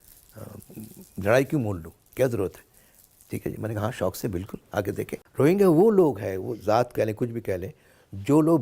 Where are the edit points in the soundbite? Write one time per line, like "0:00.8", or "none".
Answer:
0:05.2